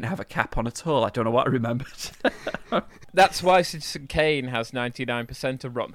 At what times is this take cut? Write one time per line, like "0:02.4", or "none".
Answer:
0:03.0